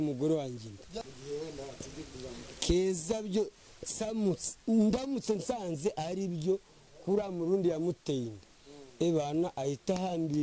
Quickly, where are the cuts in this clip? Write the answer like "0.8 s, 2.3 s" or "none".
0.9 s